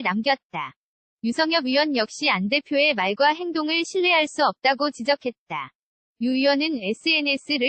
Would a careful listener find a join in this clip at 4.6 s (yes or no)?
no